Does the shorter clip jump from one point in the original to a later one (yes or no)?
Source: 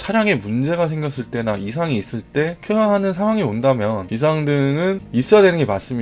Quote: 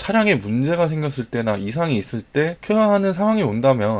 no